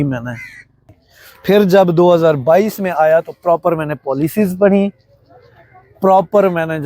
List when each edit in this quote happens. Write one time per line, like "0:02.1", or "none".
0:00.9